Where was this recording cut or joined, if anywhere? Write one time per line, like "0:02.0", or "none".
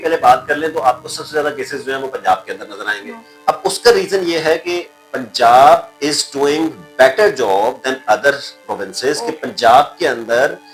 none